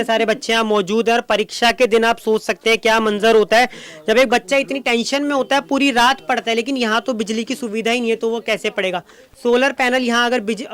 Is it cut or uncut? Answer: uncut